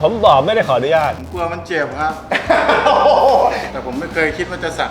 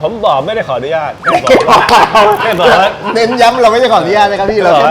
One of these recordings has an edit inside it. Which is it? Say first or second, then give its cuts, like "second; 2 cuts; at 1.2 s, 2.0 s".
first; 2 cuts; at 1.2 s, 3.7 s